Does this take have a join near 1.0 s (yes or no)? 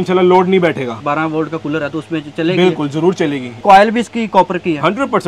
yes